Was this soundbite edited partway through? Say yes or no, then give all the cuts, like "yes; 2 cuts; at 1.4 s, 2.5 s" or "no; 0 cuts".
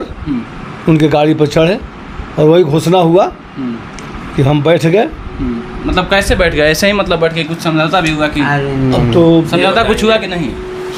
no; 0 cuts